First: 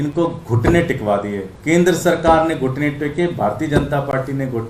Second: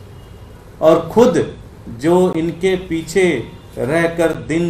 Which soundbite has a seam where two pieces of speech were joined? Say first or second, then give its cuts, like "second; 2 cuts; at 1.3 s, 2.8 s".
first; 1 cut; at 1.5 s